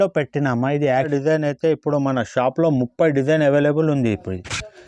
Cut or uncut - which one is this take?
cut